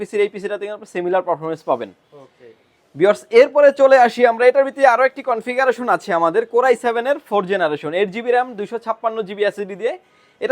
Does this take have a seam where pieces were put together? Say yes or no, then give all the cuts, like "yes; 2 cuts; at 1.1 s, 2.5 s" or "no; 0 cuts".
no; 0 cuts